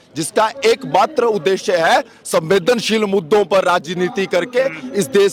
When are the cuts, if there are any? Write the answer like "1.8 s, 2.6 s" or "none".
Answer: none